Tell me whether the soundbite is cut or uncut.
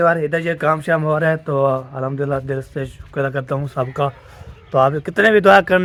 uncut